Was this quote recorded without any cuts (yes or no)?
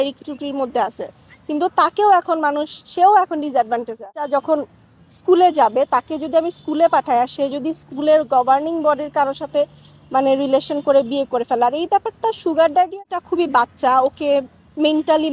no